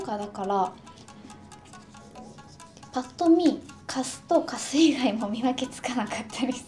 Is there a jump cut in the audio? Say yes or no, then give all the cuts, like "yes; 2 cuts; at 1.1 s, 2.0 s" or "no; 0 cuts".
no; 0 cuts